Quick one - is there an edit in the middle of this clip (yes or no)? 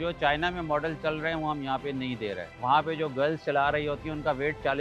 yes